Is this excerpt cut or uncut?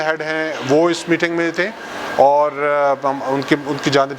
uncut